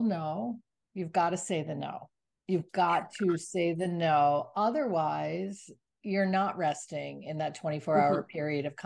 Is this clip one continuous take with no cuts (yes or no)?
yes